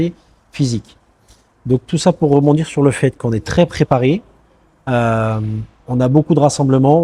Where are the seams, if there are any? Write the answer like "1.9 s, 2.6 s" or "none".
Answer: none